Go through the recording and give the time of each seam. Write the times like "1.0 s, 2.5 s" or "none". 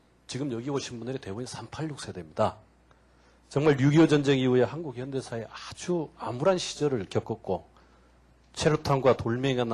none